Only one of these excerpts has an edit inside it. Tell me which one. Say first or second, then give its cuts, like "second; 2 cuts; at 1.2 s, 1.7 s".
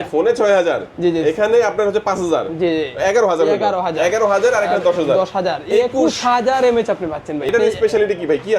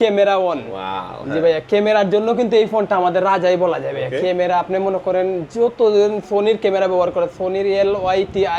first; 1 cut; at 7.5 s